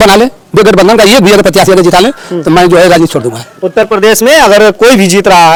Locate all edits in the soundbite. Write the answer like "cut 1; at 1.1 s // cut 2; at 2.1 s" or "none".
none

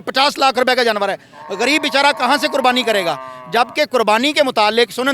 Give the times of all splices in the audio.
none

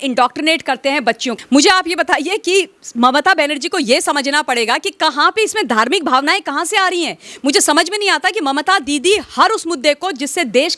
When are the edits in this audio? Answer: cut 1; at 1.4 s

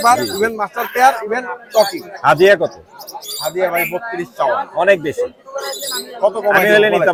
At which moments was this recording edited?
none

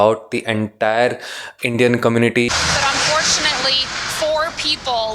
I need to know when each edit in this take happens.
cut 1; at 2.5 s

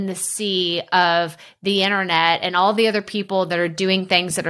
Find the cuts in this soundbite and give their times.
none

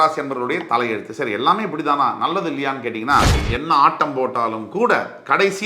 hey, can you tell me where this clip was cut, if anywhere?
cut 1; at 3.5 s

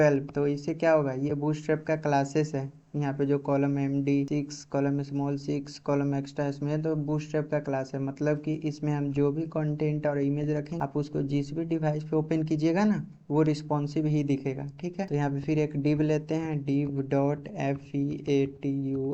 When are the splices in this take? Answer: cut 1; at 10.7 s // cut 2; at 15.1 s

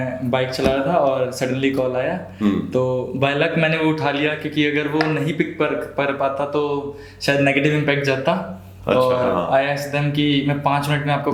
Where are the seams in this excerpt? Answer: none

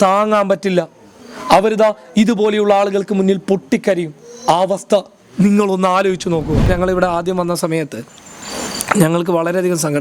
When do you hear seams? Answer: cut 1; at 6.6 s

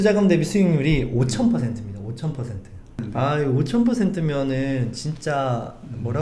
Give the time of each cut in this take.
cut 1; at 3.0 s

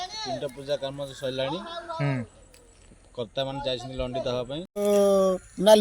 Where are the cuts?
cut 1; at 4.7 s

